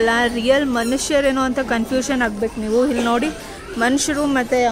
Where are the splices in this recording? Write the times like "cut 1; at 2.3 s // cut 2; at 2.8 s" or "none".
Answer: none